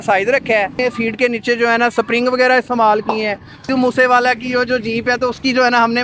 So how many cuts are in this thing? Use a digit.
2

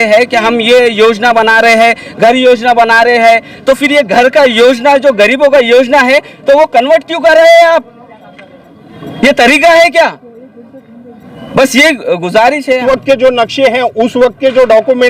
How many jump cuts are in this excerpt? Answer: 1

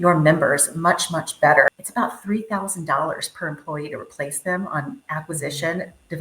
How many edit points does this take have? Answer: 1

